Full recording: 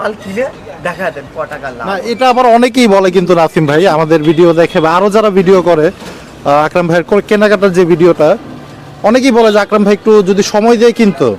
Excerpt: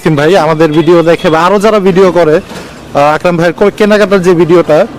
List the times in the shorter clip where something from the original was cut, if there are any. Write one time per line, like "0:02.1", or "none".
none